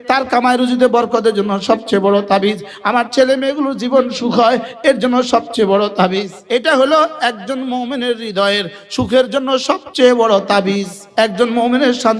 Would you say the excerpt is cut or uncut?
cut